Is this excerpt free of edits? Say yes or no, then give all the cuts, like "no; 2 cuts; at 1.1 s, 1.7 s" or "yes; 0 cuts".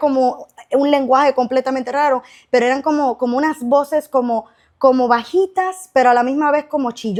yes; 0 cuts